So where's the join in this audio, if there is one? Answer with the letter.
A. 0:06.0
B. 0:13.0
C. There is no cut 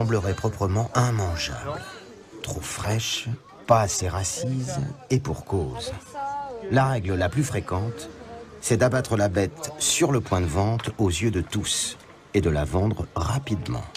C